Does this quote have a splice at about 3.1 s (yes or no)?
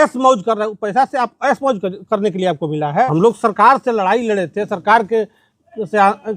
yes